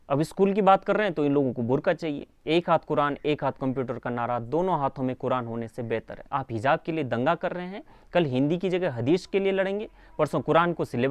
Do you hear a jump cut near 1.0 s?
no; 2 cuts; at 2.3 s, 6.1 s

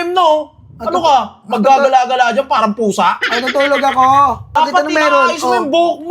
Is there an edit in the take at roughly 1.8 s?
no; 1 cut; at 4.6 s

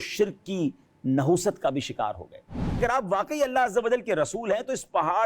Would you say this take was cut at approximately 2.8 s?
yes; 1 cut; at 2.8 s

